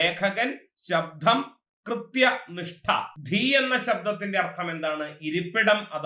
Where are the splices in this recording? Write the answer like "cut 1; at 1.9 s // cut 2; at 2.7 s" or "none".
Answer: cut 1; at 3.1 s